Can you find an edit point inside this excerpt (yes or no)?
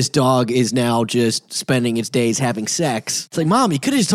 yes